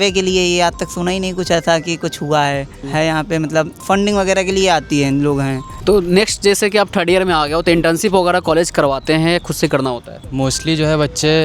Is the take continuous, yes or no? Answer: yes